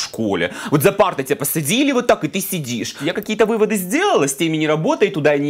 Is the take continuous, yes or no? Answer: no